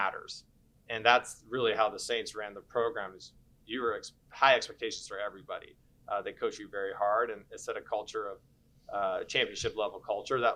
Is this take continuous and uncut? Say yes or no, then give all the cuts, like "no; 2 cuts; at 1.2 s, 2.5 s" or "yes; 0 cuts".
yes; 0 cuts